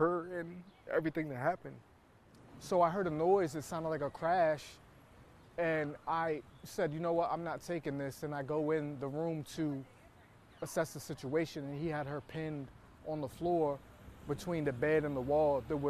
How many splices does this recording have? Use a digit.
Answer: 0